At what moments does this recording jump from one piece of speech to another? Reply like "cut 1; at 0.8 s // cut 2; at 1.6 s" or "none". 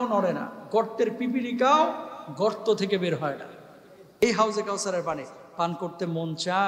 cut 1; at 4.2 s